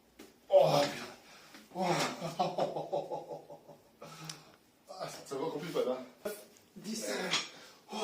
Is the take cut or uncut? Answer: cut